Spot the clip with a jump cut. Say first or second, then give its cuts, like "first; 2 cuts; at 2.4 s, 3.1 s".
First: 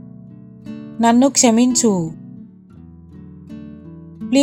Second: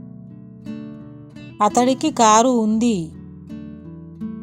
second; 2 cuts; at 0.9 s, 3.7 s